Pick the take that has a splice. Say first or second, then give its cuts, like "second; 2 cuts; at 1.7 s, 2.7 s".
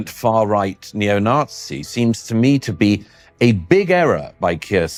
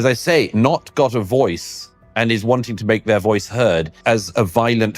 second; 1 cut; at 3.9 s